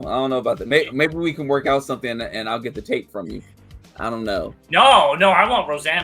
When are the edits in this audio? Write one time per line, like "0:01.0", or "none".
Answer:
none